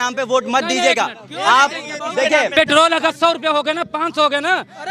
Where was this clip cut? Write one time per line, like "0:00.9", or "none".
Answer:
0:02.5